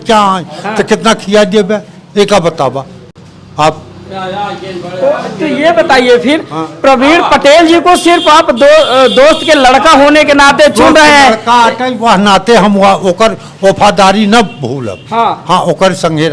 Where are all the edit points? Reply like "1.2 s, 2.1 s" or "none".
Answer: none